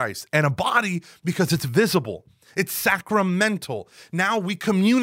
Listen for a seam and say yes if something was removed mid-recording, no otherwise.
no